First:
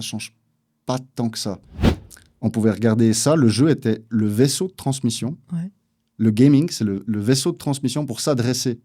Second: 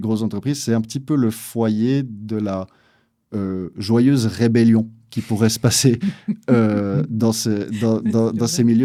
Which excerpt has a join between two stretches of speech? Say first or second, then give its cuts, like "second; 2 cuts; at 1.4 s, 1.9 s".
first; 1 cut; at 2.0 s